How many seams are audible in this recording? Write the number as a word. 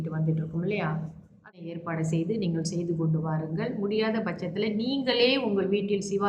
one